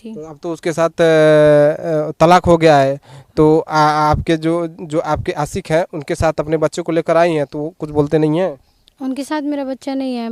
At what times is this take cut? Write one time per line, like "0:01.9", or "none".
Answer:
none